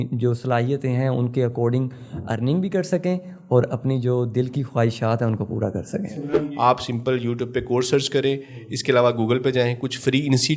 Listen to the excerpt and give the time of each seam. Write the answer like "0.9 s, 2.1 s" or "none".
6.2 s